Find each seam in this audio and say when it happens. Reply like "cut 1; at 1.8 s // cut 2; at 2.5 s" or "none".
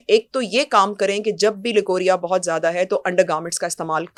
none